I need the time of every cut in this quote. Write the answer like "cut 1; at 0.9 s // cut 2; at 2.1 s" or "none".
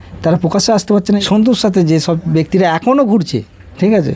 cut 1; at 1.2 s